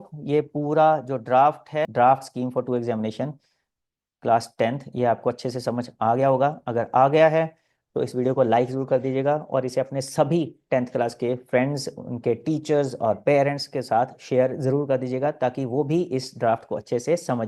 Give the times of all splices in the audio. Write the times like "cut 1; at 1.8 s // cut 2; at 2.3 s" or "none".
cut 1; at 1.9 s